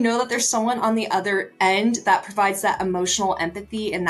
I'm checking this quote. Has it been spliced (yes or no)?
no